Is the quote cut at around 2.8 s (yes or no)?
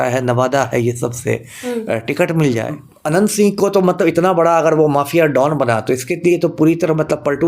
yes